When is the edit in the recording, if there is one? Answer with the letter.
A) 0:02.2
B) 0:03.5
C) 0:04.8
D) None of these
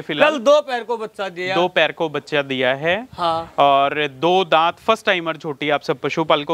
D